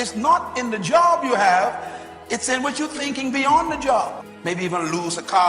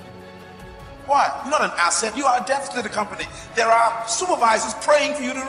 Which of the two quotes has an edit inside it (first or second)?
first